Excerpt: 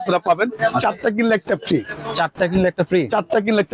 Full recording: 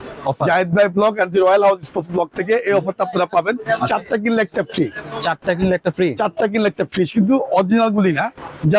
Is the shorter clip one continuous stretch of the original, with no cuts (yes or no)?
yes